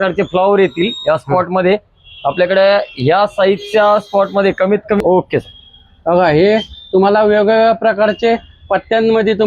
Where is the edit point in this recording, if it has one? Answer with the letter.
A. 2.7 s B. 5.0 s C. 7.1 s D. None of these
B